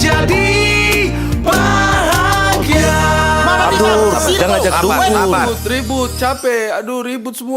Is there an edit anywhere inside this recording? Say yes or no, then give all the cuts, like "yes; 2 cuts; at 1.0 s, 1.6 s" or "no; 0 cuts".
no; 0 cuts